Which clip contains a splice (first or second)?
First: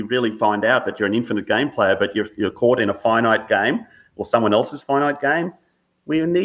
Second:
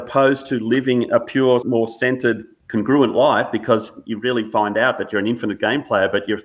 second